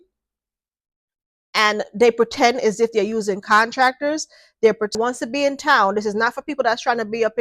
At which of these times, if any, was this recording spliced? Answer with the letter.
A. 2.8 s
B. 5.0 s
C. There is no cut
B